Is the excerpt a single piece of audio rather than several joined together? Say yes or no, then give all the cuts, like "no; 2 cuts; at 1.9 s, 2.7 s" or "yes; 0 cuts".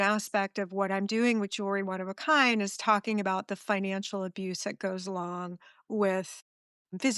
yes; 0 cuts